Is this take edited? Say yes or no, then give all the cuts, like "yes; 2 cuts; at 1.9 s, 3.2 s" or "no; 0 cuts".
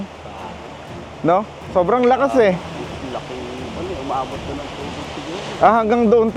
no; 0 cuts